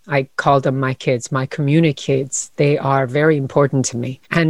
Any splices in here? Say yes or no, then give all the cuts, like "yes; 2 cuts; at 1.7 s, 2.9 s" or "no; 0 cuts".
no; 0 cuts